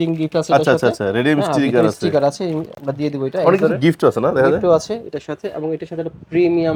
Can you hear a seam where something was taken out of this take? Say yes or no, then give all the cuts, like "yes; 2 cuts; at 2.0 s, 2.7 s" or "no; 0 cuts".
no; 0 cuts